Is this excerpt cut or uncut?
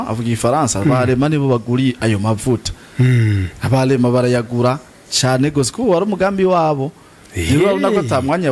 uncut